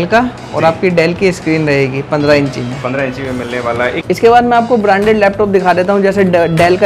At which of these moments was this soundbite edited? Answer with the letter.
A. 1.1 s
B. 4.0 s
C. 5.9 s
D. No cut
B